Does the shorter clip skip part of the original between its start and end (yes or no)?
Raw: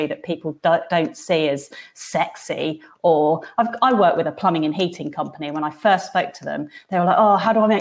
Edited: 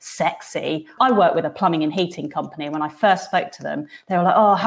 yes